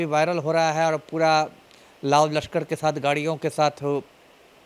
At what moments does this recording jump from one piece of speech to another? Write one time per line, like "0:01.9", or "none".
none

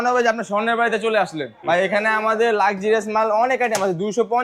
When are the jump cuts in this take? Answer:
0:01.6

